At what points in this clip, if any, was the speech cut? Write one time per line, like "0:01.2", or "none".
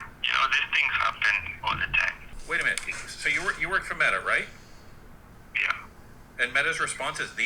0:02.3